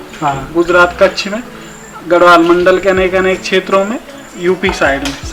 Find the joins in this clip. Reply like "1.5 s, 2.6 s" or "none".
none